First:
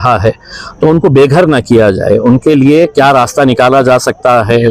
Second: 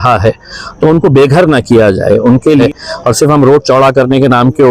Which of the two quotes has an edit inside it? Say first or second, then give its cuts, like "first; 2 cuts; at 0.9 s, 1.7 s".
second; 1 cut; at 2.6 s